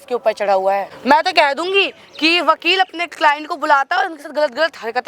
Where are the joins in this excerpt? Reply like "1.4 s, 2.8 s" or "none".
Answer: 0.9 s